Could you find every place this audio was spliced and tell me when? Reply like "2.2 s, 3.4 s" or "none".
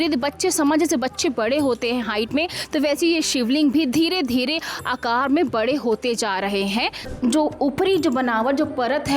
7.1 s